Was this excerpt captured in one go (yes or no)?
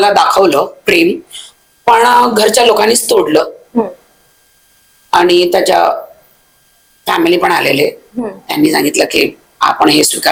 yes